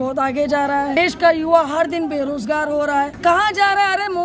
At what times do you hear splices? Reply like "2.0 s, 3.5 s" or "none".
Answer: 1.0 s, 3.1 s